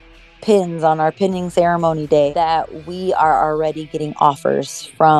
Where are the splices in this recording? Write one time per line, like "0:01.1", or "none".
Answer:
0:02.3